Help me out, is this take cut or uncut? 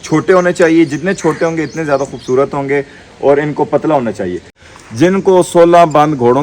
cut